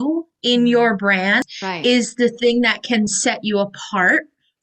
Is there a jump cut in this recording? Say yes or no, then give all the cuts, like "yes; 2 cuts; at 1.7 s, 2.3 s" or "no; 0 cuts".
yes; 1 cut; at 1.4 s